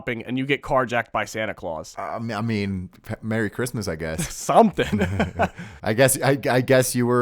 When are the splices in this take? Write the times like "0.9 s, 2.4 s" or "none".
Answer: 4.2 s